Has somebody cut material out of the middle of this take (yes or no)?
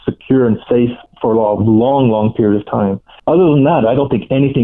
yes